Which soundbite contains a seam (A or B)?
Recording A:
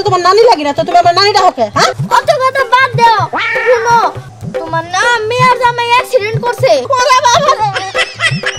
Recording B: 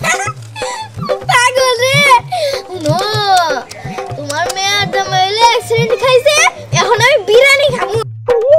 A